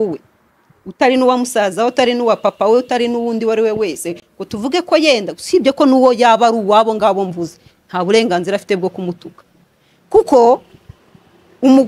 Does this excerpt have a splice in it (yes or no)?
no